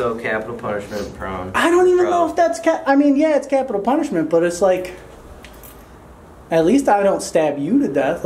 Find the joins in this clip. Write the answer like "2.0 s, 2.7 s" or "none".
none

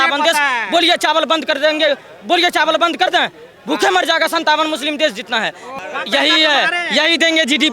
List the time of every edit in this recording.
5.7 s

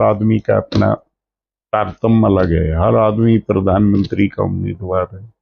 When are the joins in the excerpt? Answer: none

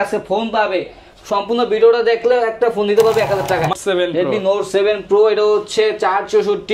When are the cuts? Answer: 3.8 s

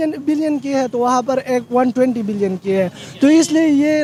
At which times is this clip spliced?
none

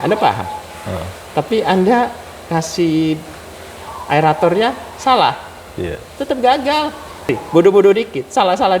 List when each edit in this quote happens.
7.3 s

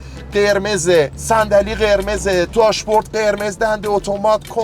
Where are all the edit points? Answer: 1.2 s, 2.5 s

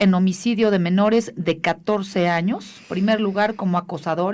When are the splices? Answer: 1.1 s

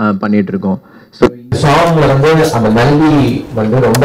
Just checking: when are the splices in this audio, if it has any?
1.6 s

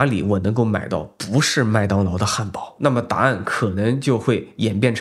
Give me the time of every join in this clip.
2.7 s

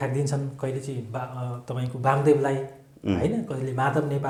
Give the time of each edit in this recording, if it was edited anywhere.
none

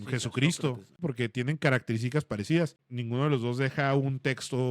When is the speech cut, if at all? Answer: 1.0 s, 2.9 s

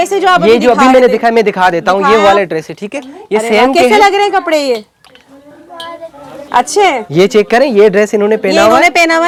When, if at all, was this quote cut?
none

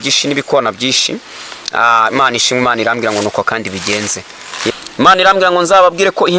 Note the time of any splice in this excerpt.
4.7 s

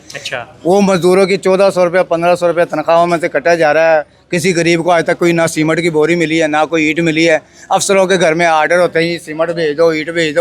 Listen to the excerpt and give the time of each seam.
none

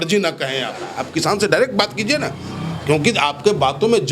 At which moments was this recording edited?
1.0 s

